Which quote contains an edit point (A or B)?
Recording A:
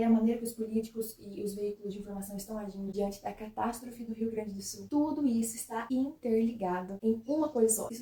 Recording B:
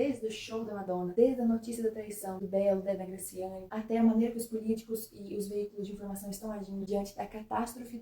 B